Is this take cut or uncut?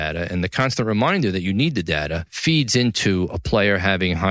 cut